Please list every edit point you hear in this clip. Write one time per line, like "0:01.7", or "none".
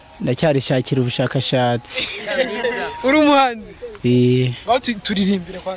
none